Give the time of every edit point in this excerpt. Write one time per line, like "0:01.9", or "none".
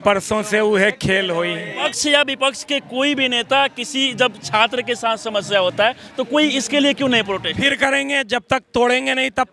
0:01.9
0:07.7